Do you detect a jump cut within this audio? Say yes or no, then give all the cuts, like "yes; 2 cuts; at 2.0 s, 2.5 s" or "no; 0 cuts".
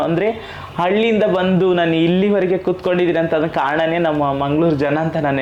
no; 0 cuts